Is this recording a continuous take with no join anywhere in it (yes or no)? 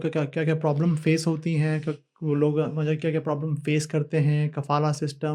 yes